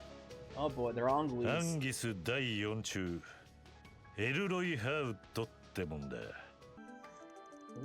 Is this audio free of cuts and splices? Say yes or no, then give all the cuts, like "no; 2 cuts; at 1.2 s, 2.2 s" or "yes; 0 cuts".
no; 1 cut; at 6.7 s